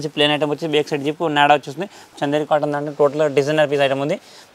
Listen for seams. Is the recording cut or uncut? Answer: cut